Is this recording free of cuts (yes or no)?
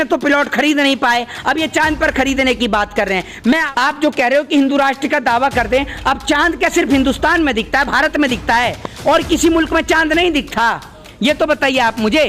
no